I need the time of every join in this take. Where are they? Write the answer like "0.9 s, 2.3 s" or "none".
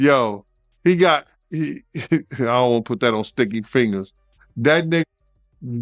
1.4 s